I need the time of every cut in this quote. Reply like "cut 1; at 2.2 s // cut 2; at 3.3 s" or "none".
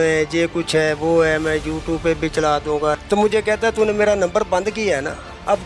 cut 1; at 3.0 s